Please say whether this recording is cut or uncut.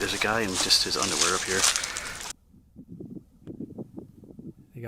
cut